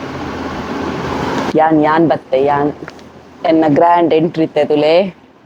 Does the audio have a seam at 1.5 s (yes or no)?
yes